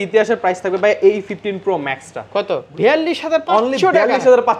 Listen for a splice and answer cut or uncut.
cut